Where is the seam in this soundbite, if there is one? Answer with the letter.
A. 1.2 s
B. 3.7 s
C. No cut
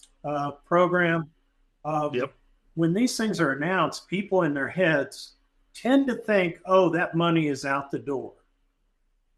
C